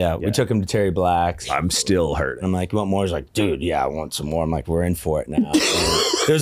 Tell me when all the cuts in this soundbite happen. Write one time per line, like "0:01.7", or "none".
0:01.4
0:02.4
0:04.6